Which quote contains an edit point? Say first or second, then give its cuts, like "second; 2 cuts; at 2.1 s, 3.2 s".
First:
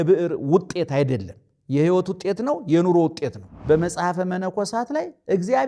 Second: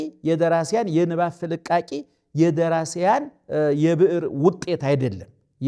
first; 1 cut; at 3.5 s